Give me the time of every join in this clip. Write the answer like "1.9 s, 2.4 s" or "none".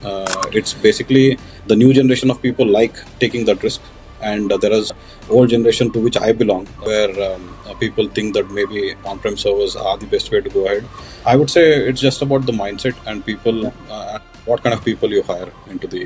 5.0 s, 6.7 s, 11.0 s